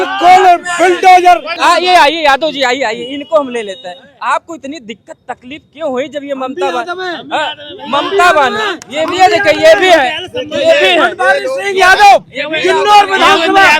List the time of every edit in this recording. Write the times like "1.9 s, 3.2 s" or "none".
1.5 s